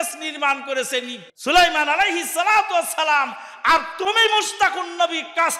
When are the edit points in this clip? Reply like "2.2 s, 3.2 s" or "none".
1.2 s